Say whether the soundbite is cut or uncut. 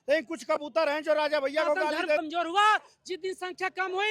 cut